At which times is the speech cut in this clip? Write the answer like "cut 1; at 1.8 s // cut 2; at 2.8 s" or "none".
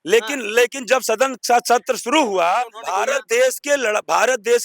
cut 1; at 2.8 s

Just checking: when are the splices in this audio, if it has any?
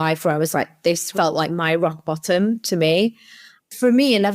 cut 1; at 1.1 s // cut 2; at 3.3 s

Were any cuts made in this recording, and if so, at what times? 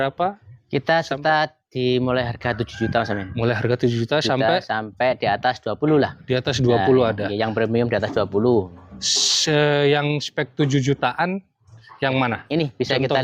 none

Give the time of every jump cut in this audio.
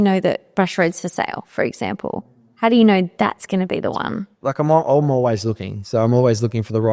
cut 1; at 4.3 s

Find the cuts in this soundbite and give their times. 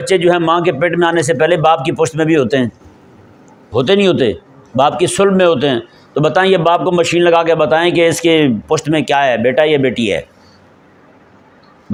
none

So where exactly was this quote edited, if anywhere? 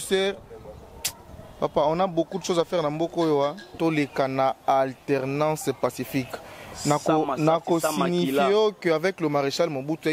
cut 1; at 3.7 s

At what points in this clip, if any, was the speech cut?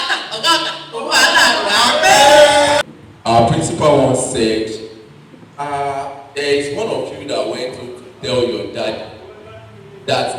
cut 1; at 2.8 s

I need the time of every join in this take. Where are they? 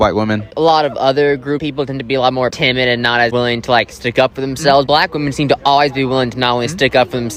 none

